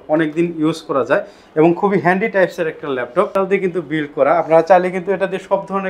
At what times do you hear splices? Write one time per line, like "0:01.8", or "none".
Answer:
0:03.3